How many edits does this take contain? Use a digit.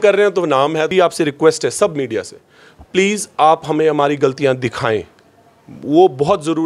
1